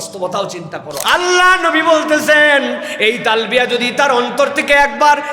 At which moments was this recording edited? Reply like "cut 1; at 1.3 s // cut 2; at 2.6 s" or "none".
cut 1; at 0.9 s